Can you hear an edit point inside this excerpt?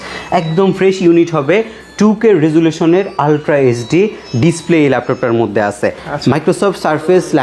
no; 0 cuts

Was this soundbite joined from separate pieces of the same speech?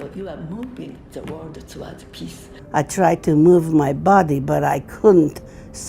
yes; 1 cut; at 2.5 s

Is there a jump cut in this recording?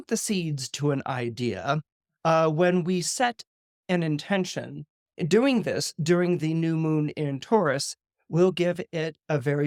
no; 0 cuts

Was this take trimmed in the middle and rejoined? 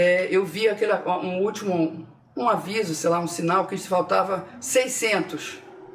no; 0 cuts

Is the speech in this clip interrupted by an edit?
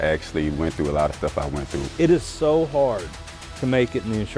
yes; 1 cut; at 1.8 s

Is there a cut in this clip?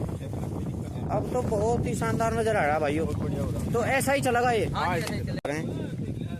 yes; 1 cut; at 5.5 s

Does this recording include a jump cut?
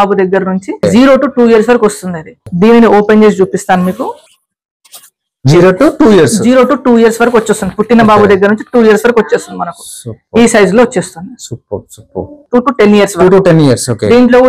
yes; 3 cuts; at 0.8 s, 2.5 s, 12.4 s

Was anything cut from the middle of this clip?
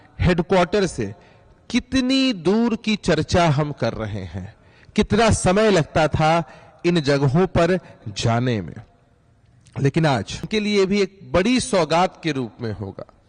yes; 1 cut; at 10.5 s

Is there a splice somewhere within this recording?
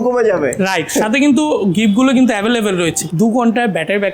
yes; 1 cut; at 3.0 s

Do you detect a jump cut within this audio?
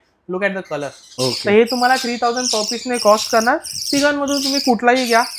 yes; 1 cut; at 1.0 s

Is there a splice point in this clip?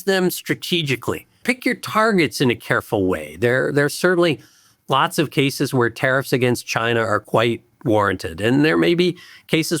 yes; 1 cut; at 1.4 s

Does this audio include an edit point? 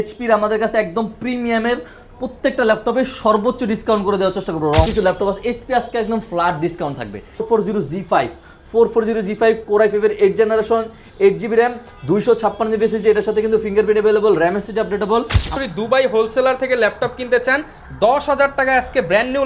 yes; 3 cuts; at 4.9 s, 7.4 s, 15.5 s

